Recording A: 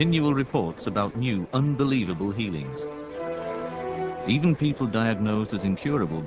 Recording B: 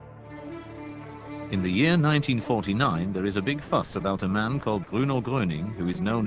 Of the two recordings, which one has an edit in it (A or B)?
A